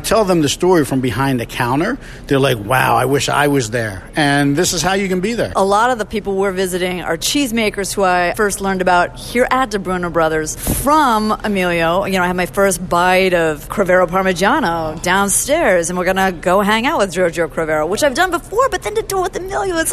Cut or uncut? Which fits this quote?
cut